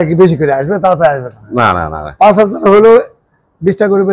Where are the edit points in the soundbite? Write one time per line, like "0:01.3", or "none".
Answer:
none